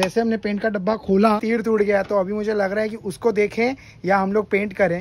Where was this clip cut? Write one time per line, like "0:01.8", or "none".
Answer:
none